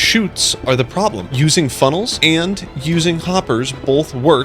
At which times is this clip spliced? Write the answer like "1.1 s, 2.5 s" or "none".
1.2 s, 2.1 s